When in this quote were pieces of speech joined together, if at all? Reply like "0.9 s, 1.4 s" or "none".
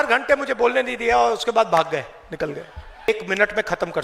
3.1 s